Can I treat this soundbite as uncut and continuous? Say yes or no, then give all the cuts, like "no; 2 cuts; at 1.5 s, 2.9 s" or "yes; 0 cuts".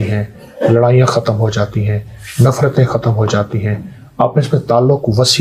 yes; 0 cuts